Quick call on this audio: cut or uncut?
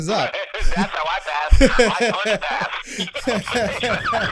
uncut